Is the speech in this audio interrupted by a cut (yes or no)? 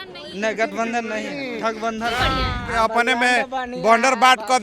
yes